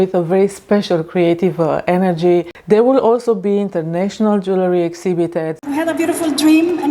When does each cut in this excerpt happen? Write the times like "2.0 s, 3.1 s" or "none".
2.5 s, 5.6 s

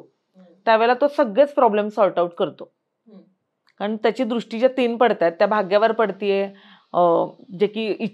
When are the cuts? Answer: none

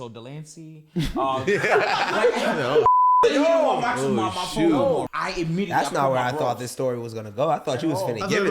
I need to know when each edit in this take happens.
5.1 s

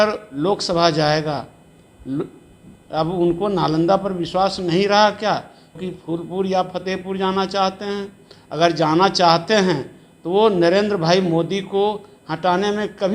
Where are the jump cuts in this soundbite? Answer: 5.8 s

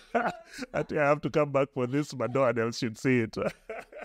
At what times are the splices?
none

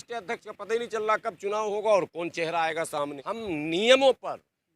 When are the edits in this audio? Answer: 3.2 s

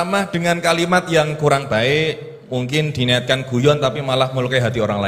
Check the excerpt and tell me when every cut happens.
none

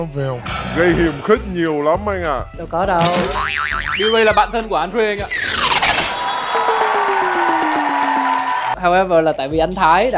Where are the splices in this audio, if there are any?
8.7 s

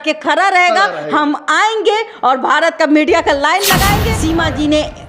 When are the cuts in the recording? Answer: 4.1 s

